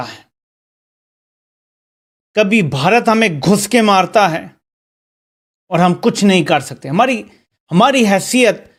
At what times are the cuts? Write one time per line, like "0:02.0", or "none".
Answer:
none